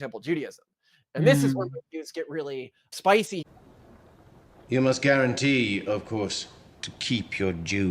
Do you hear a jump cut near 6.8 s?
no; 1 cut; at 3.4 s

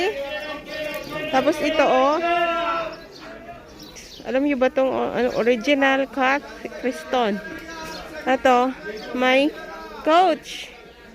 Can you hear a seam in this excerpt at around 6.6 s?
no; 1 cut; at 4.1 s

